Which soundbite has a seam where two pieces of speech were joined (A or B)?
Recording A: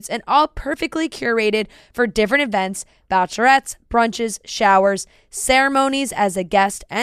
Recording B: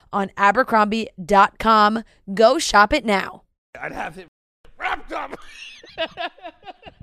B